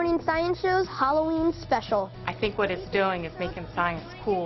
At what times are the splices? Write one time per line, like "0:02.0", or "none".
0:02.2